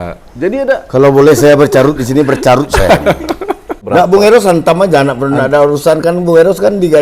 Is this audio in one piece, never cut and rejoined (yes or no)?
no